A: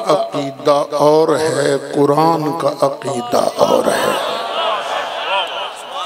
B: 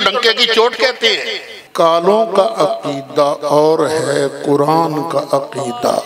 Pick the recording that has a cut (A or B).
B